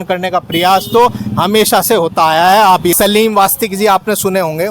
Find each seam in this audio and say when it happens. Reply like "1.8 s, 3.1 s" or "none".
2.9 s